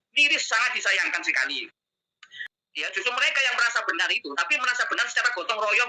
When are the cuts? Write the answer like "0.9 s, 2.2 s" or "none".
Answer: 2.4 s